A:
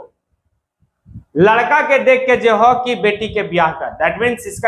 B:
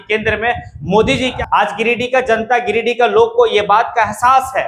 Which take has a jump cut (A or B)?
B